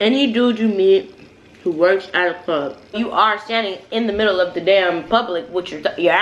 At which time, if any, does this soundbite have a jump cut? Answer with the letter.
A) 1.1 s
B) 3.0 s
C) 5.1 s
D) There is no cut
B